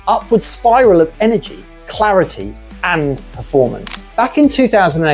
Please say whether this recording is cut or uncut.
cut